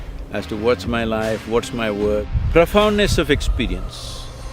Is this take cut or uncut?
cut